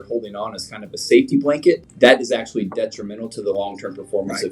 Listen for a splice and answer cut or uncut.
cut